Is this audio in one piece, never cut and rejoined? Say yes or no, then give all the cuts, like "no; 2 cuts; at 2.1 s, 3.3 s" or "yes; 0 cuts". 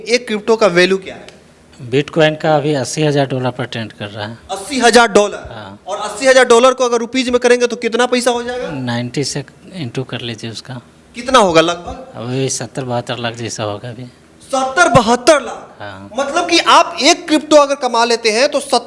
yes; 0 cuts